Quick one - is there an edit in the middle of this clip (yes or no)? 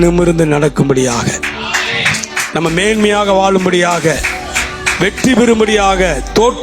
no